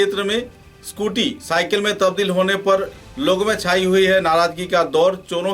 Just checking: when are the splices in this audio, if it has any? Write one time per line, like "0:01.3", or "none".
none